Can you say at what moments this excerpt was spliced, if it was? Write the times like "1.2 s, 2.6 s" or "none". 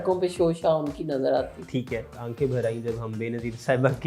2.2 s